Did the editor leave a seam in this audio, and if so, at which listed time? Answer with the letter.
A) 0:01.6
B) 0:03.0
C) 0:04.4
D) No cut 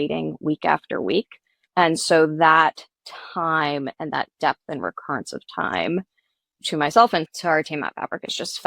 A